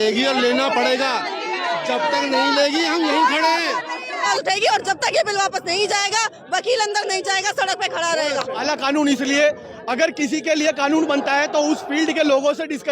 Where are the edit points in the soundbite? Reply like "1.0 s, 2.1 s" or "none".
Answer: 4.3 s, 8.6 s